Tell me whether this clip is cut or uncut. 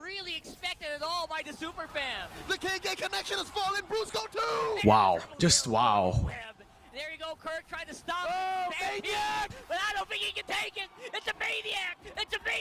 uncut